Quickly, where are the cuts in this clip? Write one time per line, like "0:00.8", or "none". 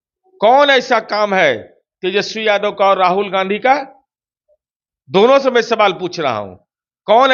none